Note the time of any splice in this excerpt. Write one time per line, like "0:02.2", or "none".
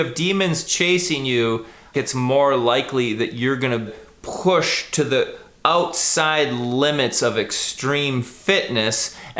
0:01.9
0:04.1